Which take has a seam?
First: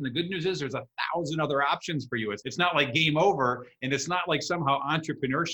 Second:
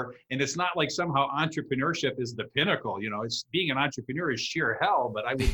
first; 1 cut; at 2.4 s

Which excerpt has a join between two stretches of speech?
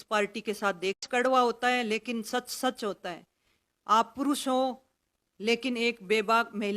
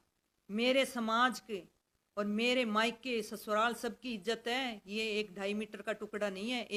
first; 1 cut; at 1.0 s

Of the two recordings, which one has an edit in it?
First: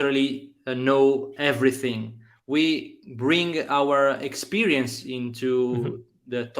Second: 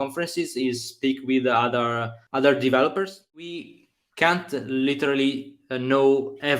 second; 2 cuts; at 2.1 s, 3.4 s

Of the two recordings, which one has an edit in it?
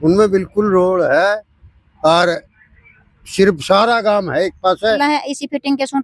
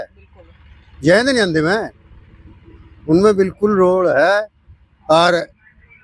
first; 1 cut; at 5.0 s

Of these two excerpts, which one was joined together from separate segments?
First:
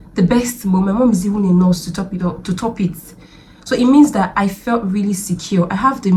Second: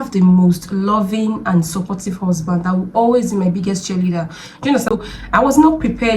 second; 1 cut; at 4.9 s

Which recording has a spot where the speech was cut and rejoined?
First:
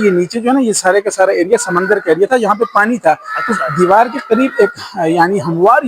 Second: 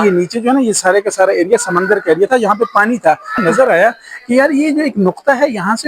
second; 1 cut; at 3.3 s

